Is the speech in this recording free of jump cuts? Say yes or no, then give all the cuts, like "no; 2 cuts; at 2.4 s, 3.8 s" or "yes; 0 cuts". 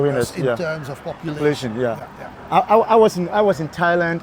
yes; 0 cuts